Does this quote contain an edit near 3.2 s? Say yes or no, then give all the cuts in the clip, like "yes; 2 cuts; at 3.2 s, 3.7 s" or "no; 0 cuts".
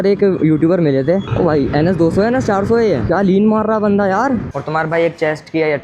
no; 2 cuts; at 1.3 s, 4.5 s